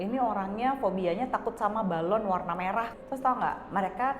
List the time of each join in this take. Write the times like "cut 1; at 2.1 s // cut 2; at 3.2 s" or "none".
cut 1; at 2.9 s